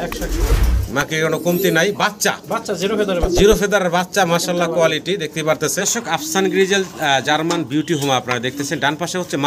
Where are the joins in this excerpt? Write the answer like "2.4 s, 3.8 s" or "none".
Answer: 5.8 s